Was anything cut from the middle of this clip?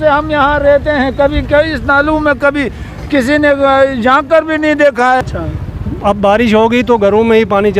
yes; 1 cut; at 5.2 s

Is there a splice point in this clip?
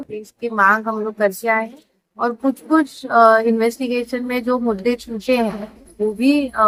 no; 0 cuts

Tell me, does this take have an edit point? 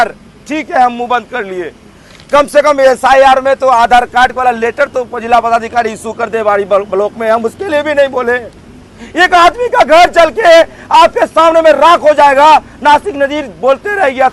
no; 0 cuts

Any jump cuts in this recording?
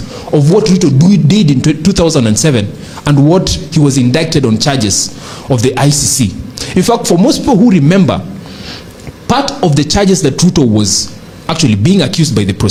no; 0 cuts

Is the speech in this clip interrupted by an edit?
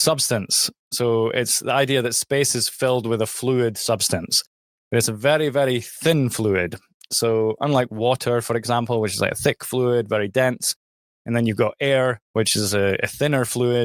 no; 0 cuts

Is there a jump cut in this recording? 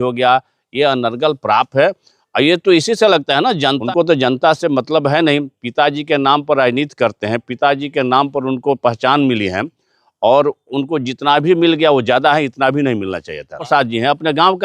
yes; 2 cuts; at 3.8 s, 13.6 s

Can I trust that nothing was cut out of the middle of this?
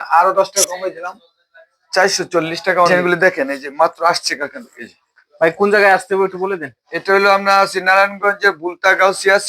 no; 1 cut; at 3.1 s

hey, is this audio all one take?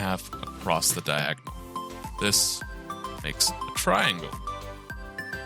no; 1 cut; at 4.5 s

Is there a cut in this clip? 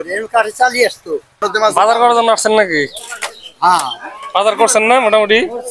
yes; 1 cut; at 1.5 s

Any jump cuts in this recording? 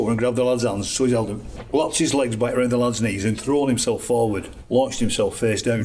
yes; 2 cuts; at 1.5 s, 4.5 s

